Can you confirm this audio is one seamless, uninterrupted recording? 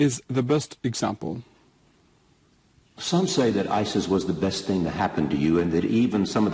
yes; 0 cuts

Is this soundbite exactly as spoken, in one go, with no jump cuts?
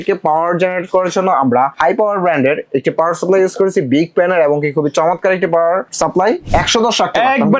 no; 2 cuts; at 1.7 s, 6.3 s

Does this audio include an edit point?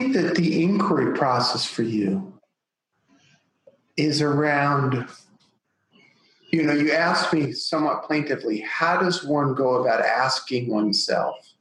no; 0 cuts

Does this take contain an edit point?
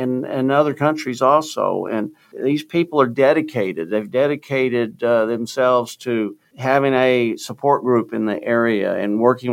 yes; 2 cuts; at 2.3 s, 6.5 s

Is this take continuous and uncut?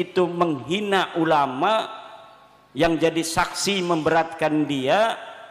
yes; 0 cuts

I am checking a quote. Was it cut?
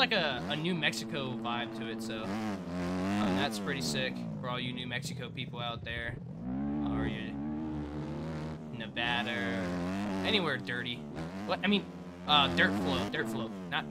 no; 0 cuts

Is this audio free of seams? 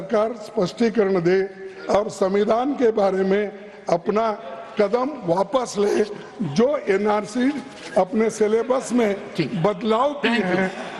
yes; 0 cuts

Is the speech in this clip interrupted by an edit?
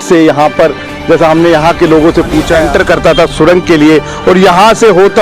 yes; 1 cut; at 2.6 s

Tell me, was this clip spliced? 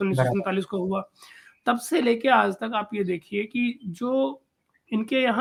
no; 0 cuts

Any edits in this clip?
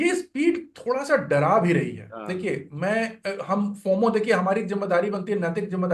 no; 0 cuts

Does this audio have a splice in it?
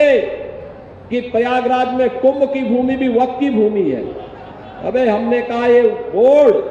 no; 0 cuts

